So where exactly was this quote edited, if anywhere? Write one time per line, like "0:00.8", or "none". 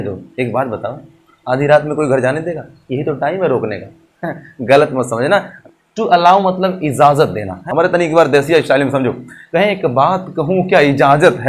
0:05.6
0:07.5